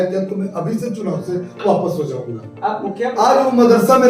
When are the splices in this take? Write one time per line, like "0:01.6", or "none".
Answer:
0:02.8

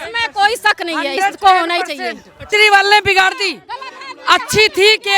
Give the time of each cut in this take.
0:02.5

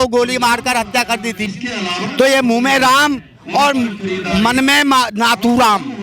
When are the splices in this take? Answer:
0:01.5

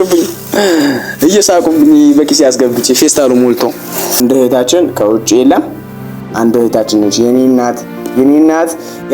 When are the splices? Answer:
0:04.0

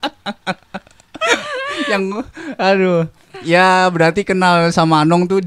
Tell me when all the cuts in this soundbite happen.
none

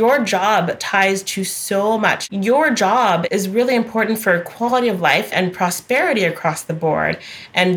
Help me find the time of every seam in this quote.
0:02.2
0:03.2
0:05.3

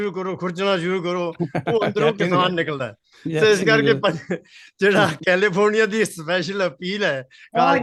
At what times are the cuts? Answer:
none

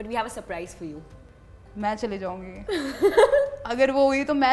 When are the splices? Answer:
0:01.1

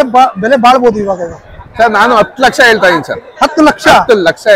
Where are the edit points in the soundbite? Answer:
none

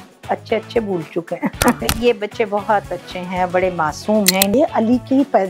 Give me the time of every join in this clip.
0:01.8
0:04.5

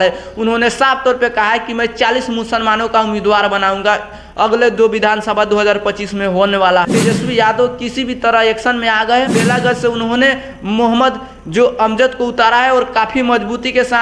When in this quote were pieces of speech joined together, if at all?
0:06.9
0:09.4

